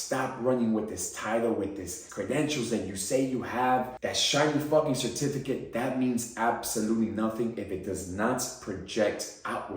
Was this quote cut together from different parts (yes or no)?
yes